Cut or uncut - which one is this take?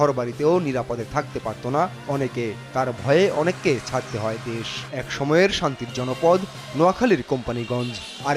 cut